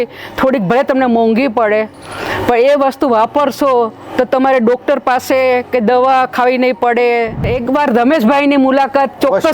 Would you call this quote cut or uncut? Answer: cut